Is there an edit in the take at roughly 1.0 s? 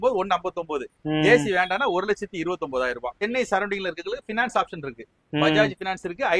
no; 1 cut; at 3.2 s

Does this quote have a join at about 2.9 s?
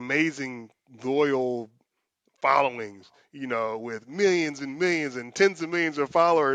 no; 0 cuts

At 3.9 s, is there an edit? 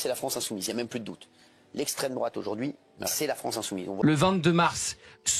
yes; 1 cut; at 3.9 s

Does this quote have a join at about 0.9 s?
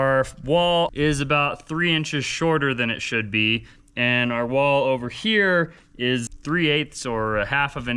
yes; 2 cuts; at 0.9 s, 6.3 s

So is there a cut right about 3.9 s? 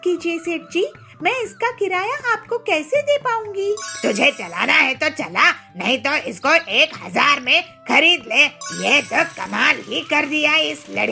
yes; 2 cuts; at 3.9 s, 8.6 s

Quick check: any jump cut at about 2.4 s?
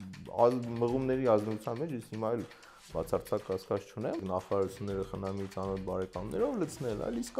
no; 1 cut; at 4.2 s

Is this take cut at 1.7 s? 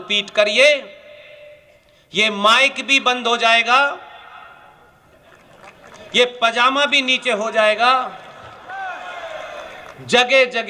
no; 1 cut; at 8.5 s

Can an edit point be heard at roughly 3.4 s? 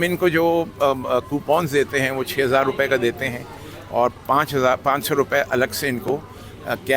no; 0 cuts

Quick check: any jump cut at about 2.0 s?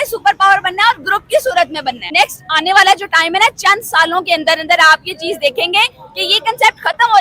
yes; 1 cut; at 2.0 s

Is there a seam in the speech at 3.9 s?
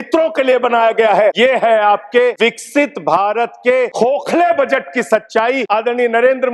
yes; 4 cuts; at 1.3 s, 2.4 s, 3.9 s, 5.6 s

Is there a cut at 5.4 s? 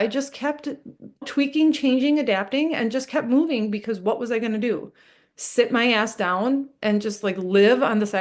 no; 1 cut; at 1.3 s

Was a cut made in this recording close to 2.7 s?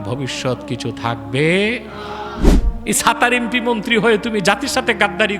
yes; 1 cut; at 2.7 s

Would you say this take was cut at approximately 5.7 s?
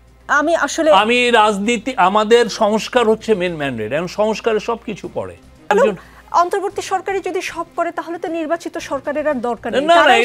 yes; 1 cut; at 5.7 s

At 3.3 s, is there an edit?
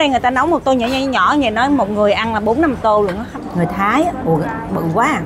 yes; 1 cut; at 3.3 s

